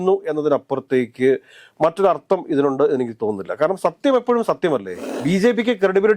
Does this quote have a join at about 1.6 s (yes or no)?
no